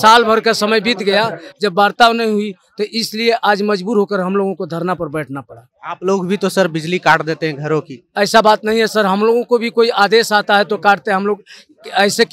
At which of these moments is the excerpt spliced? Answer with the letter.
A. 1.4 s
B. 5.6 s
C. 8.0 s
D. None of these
D